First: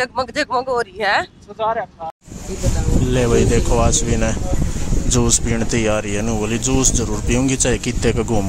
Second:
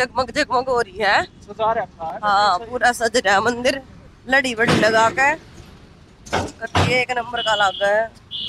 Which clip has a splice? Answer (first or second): first